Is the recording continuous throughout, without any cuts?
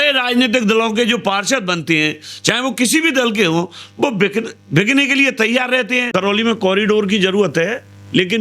no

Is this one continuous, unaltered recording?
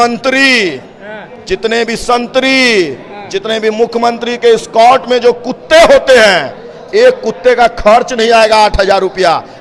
yes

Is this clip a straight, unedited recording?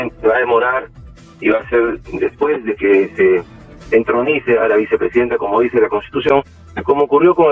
yes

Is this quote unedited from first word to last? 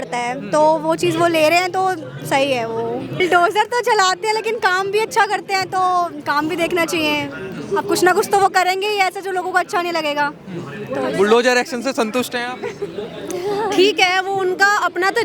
no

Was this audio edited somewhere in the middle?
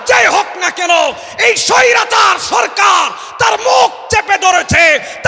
no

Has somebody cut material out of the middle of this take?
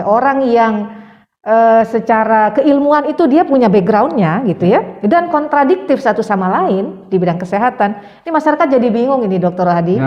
no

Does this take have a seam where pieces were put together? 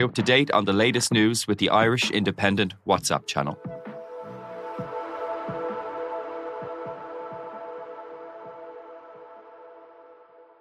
no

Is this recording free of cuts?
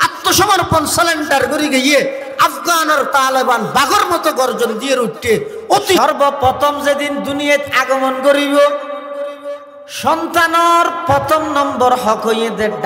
no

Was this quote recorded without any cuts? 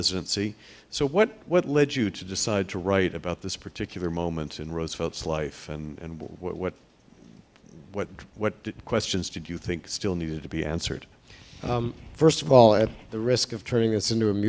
yes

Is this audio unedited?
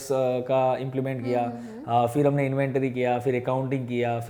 yes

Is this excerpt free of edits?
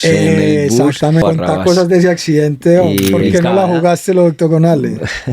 no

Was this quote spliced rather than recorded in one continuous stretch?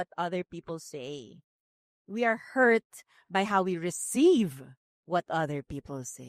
no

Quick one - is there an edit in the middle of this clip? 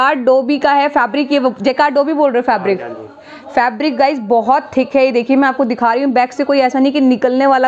no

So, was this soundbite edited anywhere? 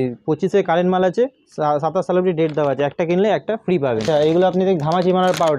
yes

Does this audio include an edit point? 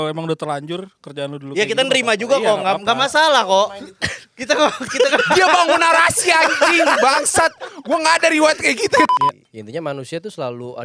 yes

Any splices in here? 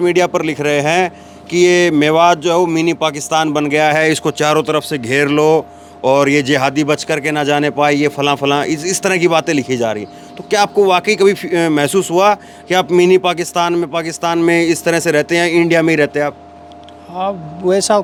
no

